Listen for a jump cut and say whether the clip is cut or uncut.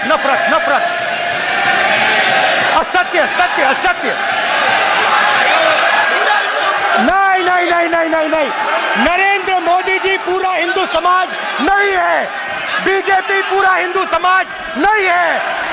cut